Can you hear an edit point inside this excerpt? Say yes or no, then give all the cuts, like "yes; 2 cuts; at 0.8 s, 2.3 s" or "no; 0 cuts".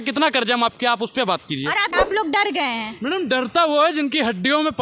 yes; 1 cut; at 1.9 s